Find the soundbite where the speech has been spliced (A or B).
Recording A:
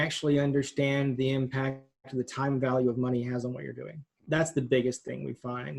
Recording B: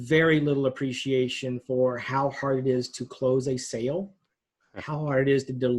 A